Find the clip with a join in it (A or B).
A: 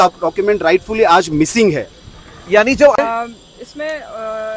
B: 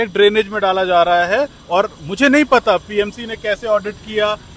A